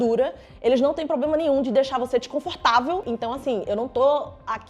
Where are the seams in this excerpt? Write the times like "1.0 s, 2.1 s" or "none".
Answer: 3.0 s